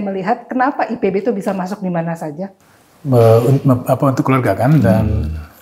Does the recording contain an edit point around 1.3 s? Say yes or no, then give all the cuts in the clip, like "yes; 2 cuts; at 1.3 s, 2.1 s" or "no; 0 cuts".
no; 1 cut; at 2.5 s